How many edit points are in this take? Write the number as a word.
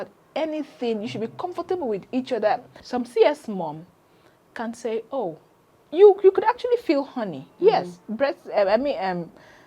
one